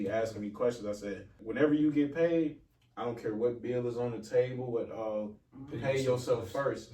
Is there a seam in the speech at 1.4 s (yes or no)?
yes